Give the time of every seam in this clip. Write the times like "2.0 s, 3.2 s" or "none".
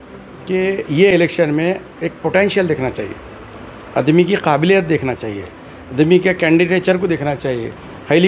none